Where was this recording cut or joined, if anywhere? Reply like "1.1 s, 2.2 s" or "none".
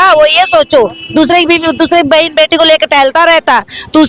none